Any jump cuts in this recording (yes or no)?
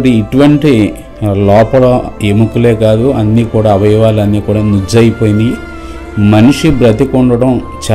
no